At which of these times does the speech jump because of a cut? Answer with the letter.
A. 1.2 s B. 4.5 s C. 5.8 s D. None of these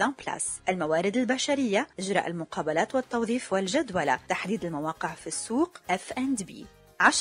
D